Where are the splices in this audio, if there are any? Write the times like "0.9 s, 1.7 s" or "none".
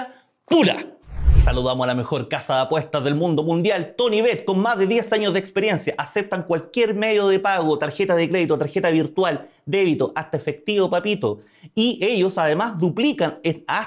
1.2 s

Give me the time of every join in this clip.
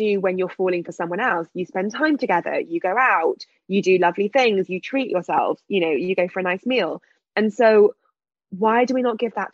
none

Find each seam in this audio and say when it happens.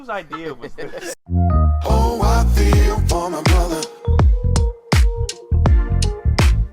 1.1 s

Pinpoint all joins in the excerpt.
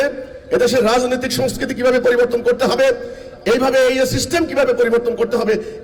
none

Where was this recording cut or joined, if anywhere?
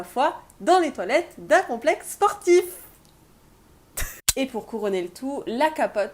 4.2 s

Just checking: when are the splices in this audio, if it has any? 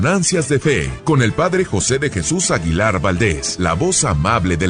0.9 s, 3.5 s

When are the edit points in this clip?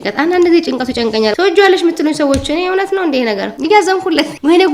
1.3 s, 3.6 s

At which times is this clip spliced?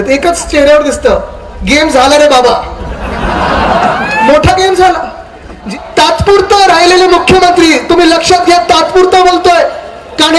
5.6 s

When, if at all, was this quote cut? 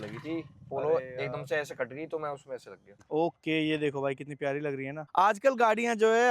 3.0 s, 5.0 s

